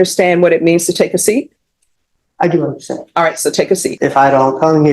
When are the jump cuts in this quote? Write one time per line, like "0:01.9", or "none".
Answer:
0:03.9